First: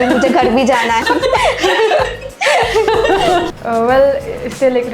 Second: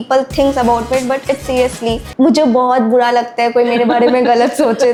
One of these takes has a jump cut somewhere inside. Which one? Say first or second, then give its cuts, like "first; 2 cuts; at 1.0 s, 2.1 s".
first; 2 cuts; at 1.0 s, 3.5 s